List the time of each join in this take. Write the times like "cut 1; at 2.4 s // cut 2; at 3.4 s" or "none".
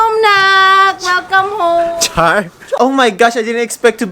cut 1; at 2.7 s